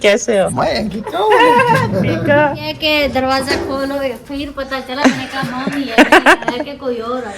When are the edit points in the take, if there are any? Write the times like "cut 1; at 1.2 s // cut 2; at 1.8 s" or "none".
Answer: cut 1; at 2.8 s